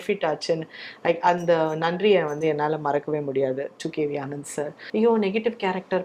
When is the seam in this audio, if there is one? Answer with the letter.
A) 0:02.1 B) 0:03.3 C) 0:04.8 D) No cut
C